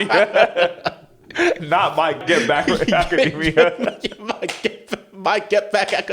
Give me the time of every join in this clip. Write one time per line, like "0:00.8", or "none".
0:02.2